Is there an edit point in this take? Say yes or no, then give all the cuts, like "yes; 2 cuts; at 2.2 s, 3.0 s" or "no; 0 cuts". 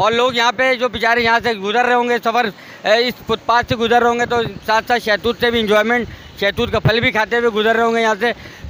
no; 0 cuts